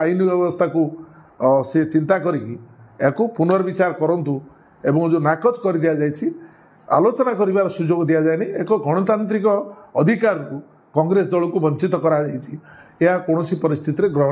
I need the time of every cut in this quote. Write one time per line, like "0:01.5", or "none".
none